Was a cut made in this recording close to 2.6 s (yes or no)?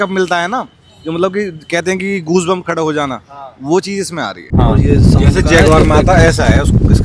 no